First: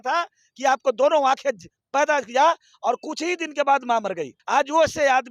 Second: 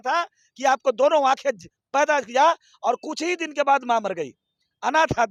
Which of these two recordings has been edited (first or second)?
first